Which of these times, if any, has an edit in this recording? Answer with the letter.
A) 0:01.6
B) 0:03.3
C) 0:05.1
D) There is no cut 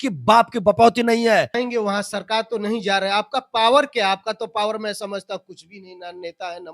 A